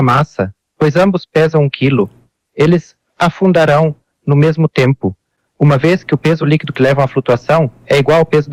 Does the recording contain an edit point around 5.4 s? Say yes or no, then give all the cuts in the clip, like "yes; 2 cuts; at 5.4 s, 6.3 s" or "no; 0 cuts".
no; 0 cuts